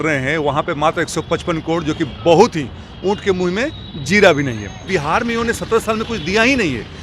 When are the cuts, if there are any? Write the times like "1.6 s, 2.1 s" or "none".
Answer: 4.8 s